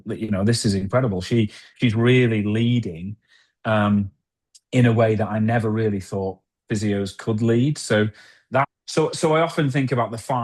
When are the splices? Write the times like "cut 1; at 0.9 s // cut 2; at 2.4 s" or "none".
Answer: cut 1; at 8.7 s